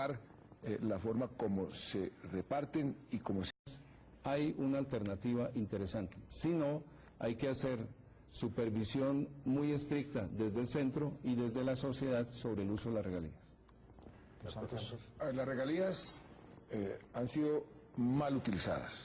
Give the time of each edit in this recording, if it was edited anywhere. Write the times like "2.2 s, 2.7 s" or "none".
none